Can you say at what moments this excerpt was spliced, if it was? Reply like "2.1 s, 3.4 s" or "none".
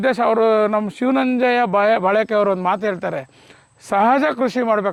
none